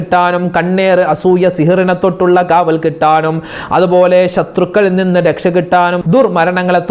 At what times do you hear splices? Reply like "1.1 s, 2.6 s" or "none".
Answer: 6.0 s